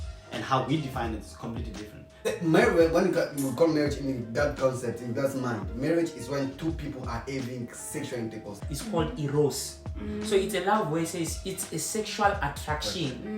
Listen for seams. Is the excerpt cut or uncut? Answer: cut